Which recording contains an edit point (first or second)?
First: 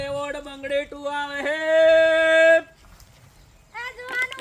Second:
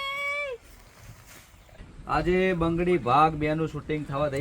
second